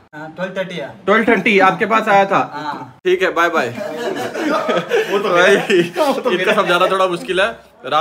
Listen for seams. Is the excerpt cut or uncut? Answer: uncut